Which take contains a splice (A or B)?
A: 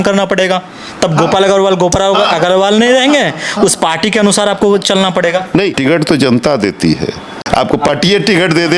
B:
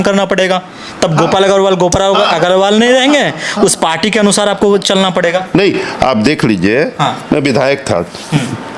A